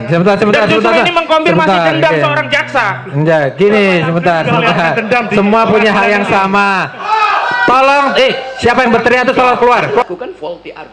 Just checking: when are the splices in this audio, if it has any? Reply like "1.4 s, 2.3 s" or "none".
10.0 s